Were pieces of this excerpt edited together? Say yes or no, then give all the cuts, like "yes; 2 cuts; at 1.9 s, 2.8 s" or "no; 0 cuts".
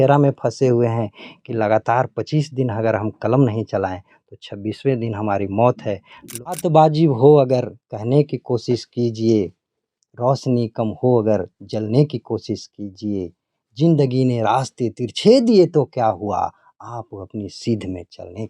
yes; 1 cut; at 6.6 s